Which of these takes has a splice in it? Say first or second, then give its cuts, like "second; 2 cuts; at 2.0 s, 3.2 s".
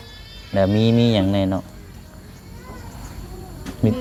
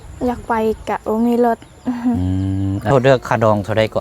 second; 1 cut; at 2.9 s